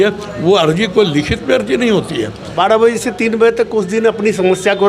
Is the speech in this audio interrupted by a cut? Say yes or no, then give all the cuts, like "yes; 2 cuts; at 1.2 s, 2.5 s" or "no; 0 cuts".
yes; 1 cut; at 2.4 s